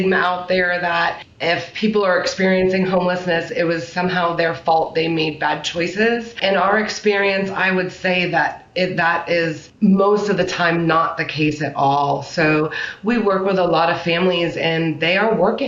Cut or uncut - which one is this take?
cut